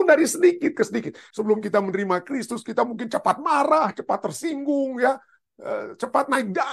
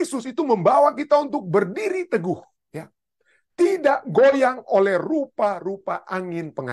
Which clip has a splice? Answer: first; 1 cut; at 1.2 s

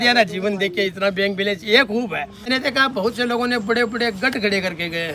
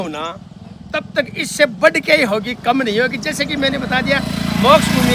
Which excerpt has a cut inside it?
first; 1 cut; at 2.5 s

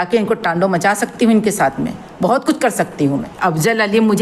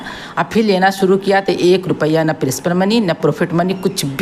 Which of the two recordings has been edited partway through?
first; 1 cut; at 3.3 s

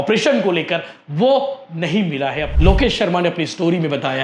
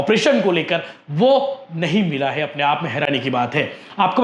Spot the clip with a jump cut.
first; 1 cut; at 2.5 s

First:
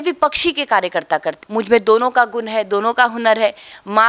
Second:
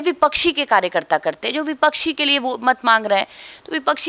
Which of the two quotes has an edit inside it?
first; 1 cut; at 1.4 s

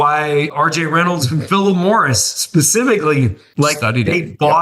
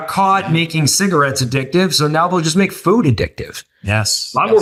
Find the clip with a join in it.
first; 1 cut; at 3.4 s

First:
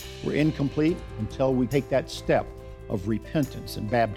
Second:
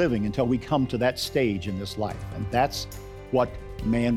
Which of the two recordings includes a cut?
first; 1 cut; at 1.7 s

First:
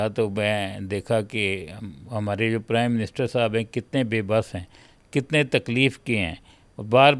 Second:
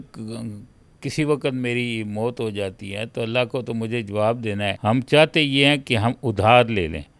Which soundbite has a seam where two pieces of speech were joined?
second; 1 cut; at 4.7 s

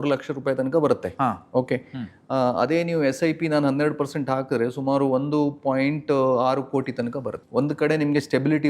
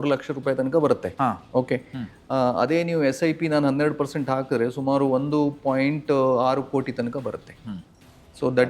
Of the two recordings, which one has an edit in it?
first; 1 cut; at 7.4 s

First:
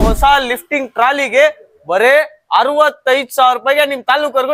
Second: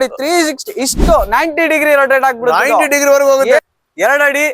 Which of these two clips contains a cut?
second; 1 cut; at 3.6 s

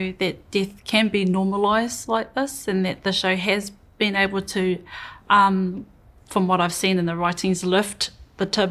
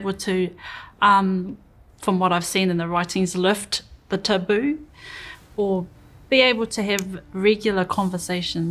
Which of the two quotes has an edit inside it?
second; 1 cut; at 6.0 s

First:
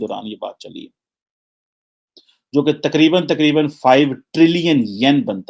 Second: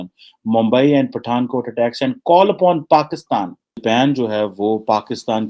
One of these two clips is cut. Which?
second; 1 cut; at 3.7 s

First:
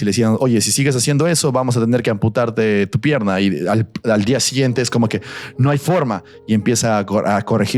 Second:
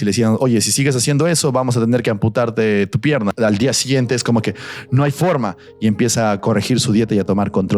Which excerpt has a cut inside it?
second; 2 cuts; at 3.3 s, 6.4 s

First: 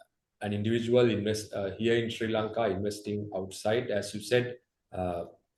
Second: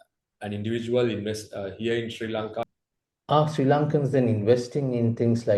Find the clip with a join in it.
second; 1 cut; at 2.7 s

